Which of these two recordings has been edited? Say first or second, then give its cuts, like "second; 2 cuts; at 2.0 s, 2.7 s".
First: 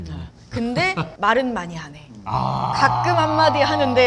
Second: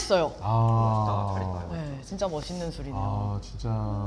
first; 1 cut; at 1.1 s